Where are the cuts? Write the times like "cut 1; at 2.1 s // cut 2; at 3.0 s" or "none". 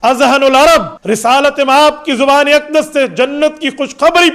cut 1; at 1.0 s